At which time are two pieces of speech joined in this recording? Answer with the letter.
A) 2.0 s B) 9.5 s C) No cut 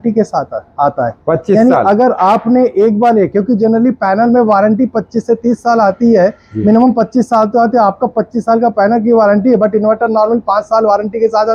C